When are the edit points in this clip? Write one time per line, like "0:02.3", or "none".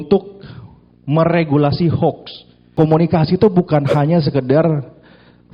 0:02.7